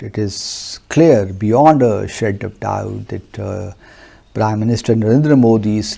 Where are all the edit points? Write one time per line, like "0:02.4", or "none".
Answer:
none